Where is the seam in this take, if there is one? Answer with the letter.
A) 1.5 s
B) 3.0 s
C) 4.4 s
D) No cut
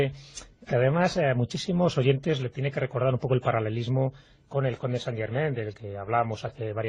A